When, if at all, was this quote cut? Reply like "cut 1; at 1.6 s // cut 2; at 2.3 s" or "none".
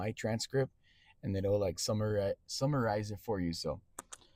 none